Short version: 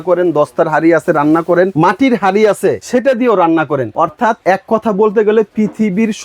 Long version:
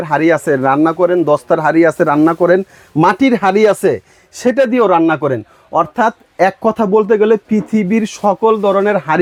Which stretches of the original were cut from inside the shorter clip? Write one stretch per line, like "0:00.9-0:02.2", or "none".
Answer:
0:02.6-0:02.9
0:04.0-0:04.3
0:05.7-0:06.1